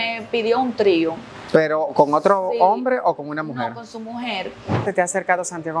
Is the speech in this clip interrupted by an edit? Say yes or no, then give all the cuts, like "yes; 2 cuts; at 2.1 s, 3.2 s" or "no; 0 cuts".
yes; 2 cuts; at 1.3 s, 4.8 s